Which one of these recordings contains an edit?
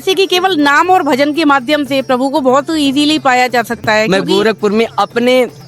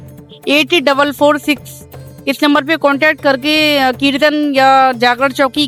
first; 1 cut; at 4.1 s

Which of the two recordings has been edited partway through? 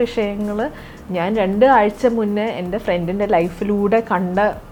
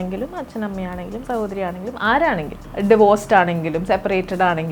second; 1 cut; at 2.6 s

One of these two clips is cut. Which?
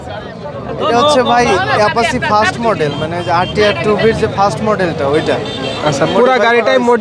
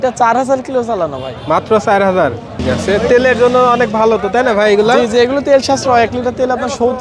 second; 1 cut; at 2.5 s

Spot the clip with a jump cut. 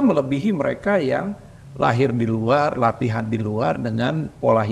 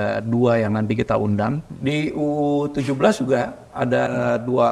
second; 1 cut; at 1.7 s

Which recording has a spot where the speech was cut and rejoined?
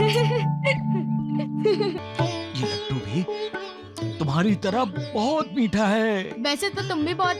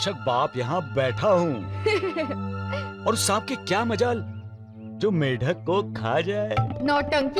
first; 1 cut; at 2.0 s

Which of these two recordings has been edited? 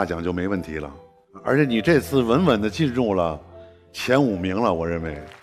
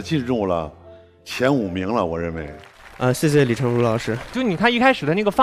second; 1 cut; at 4.3 s

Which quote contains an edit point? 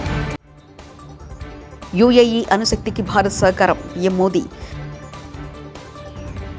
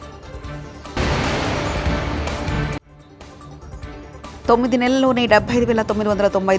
second; 2 cuts; at 0.9 s, 4.3 s

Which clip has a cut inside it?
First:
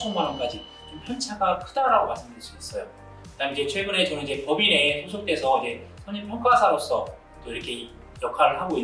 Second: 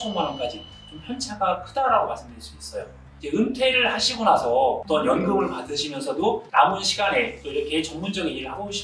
second; 3 cuts; at 3.1 s, 4.8 s, 6.4 s

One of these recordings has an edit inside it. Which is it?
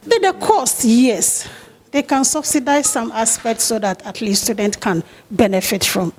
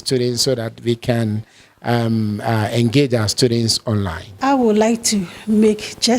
second; 1 cut; at 4.3 s

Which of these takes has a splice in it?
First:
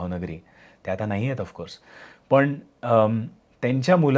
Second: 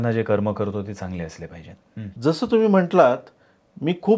second; 1 cut; at 2.1 s

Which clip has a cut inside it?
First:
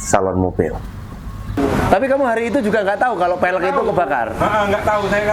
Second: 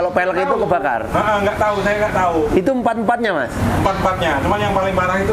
first; 1 cut; at 1.6 s

